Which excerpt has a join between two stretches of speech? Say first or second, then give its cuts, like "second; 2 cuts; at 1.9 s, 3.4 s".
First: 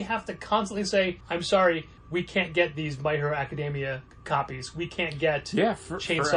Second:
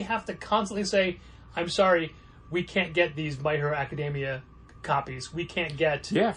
first; 3 cuts; at 1.2 s, 1.9 s, 4.1 s